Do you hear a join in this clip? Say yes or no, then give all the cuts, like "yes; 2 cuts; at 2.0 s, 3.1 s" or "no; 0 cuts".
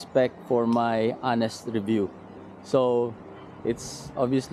no; 0 cuts